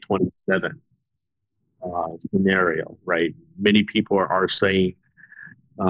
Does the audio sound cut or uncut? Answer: uncut